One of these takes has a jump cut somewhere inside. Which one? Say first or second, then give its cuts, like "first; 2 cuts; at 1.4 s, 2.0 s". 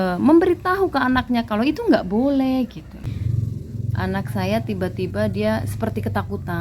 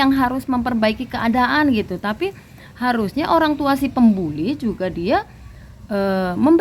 first; 1 cut; at 3.1 s